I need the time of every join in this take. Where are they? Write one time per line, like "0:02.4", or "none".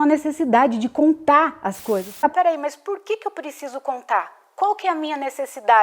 0:02.2

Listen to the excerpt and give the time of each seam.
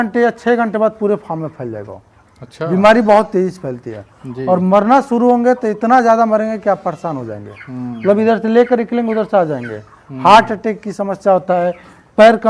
none

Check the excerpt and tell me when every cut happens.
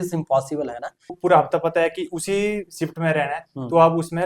0:01.2

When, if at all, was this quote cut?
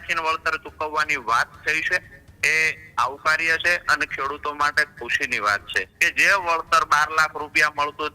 0:05.9

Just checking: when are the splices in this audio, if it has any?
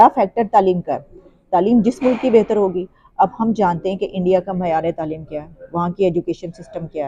none

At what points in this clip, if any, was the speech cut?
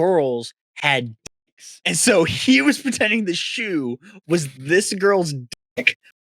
0:01.1

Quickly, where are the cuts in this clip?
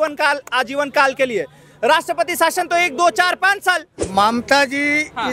0:03.9

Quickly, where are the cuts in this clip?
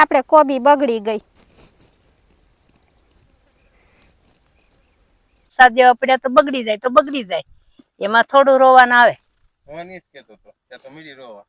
0:01.3
0:05.5

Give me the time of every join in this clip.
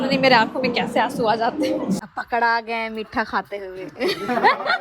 0:02.0

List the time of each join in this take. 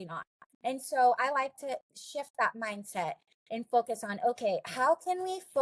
0:02.0

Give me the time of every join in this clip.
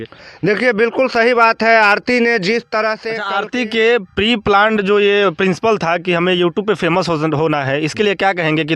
0:03.1

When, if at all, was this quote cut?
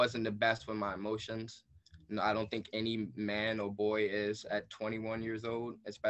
none

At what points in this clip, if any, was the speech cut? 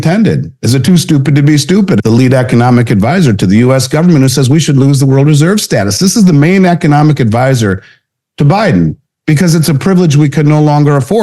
0:02.0

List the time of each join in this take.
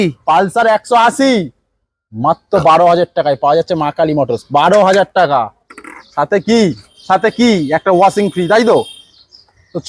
none

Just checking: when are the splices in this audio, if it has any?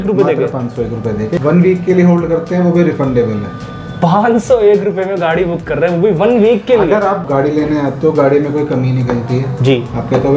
0:01.3

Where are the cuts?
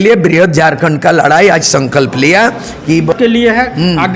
0:03.1

